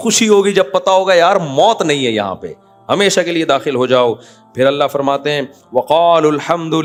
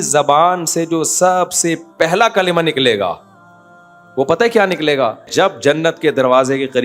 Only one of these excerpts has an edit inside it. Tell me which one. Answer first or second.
second